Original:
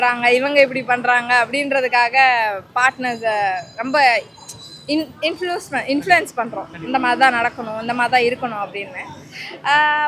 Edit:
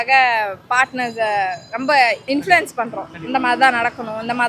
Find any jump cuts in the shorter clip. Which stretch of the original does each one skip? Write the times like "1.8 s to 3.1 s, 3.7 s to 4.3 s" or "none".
4.3 s to 5.8 s